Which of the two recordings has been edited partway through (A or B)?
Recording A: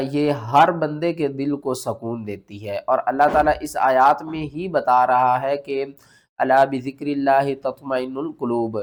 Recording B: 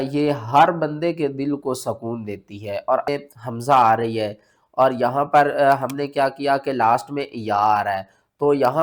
B